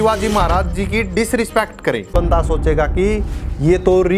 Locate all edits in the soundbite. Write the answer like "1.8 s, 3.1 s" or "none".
2.1 s